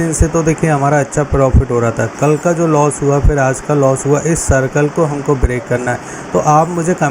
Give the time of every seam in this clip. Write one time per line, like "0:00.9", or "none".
none